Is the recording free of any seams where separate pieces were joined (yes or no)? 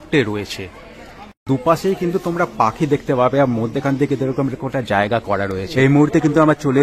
no